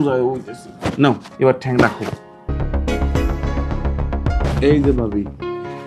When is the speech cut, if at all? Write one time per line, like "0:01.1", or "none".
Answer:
0:02.5
0:04.4